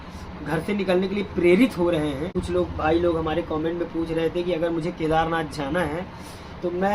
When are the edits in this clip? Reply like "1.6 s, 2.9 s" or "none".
2.3 s